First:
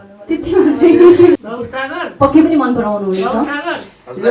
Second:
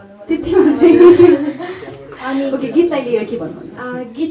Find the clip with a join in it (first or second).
first